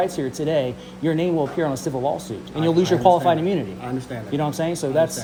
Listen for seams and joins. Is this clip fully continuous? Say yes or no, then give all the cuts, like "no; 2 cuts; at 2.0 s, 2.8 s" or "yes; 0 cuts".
yes; 0 cuts